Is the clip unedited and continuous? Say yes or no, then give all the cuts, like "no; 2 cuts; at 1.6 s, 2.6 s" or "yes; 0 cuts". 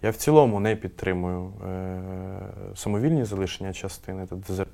yes; 0 cuts